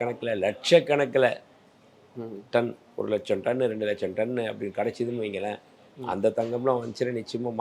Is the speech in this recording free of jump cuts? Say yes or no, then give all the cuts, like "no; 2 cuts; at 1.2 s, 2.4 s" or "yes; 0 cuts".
yes; 0 cuts